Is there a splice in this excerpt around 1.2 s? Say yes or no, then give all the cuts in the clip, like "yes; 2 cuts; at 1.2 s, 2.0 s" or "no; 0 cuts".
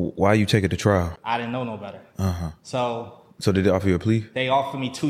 yes; 1 cut; at 1.2 s